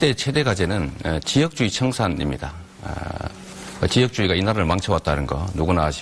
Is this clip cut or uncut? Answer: uncut